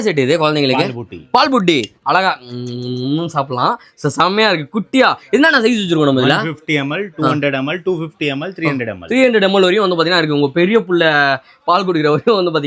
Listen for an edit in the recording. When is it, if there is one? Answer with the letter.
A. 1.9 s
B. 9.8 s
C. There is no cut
C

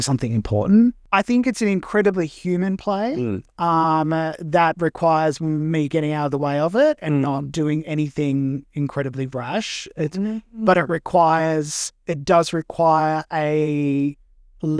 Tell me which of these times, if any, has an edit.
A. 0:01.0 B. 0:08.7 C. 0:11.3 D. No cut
A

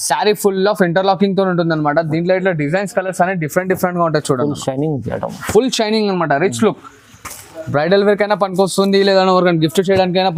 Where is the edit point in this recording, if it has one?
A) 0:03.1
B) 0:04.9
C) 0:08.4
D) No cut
D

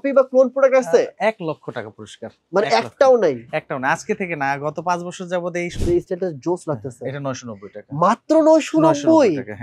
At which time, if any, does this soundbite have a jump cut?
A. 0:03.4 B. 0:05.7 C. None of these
B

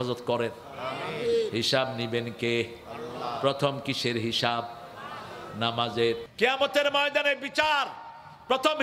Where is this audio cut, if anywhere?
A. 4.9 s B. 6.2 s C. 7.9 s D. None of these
B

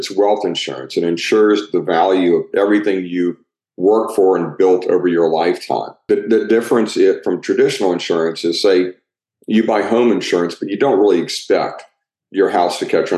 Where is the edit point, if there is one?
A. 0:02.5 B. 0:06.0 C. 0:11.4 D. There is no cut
B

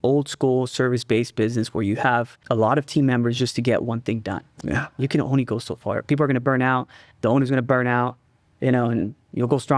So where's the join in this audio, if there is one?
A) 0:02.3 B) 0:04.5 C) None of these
A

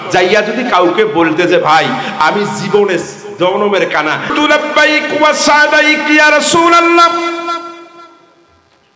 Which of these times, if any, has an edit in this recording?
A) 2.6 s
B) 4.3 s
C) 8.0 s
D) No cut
B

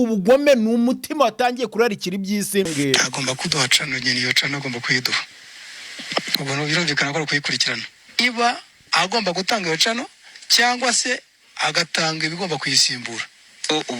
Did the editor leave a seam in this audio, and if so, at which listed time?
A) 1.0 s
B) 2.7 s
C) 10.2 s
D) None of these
B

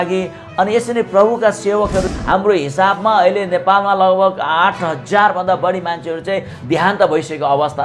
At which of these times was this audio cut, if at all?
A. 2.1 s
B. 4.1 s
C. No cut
A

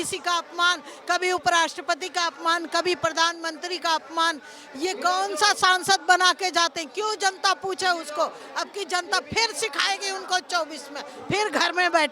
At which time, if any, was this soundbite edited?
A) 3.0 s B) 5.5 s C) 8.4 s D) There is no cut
D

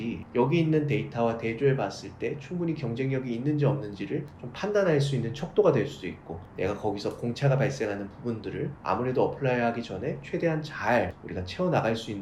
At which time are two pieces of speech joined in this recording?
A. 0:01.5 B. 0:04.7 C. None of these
C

